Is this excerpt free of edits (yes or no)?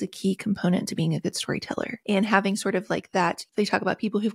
no